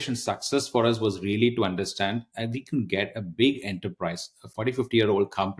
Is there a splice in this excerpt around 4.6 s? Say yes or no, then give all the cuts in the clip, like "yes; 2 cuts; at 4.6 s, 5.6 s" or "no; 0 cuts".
no; 0 cuts